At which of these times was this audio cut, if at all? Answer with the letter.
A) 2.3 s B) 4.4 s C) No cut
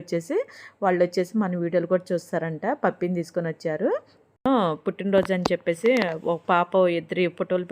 B